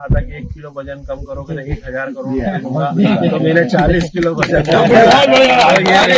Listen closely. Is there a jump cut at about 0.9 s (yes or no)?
no